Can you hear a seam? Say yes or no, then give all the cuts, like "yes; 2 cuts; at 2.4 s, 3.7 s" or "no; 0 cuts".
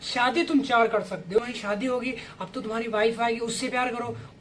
yes; 1 cut; at 1.4 s